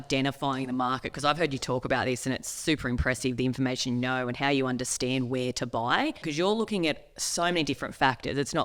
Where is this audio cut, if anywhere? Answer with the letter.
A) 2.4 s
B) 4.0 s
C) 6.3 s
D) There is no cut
C